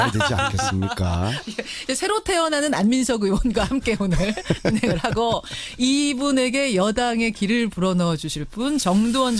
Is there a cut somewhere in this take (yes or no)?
no